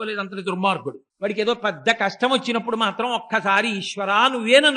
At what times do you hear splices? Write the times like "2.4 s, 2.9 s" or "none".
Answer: 1.0 s